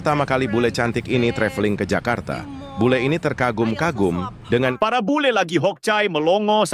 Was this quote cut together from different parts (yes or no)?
yes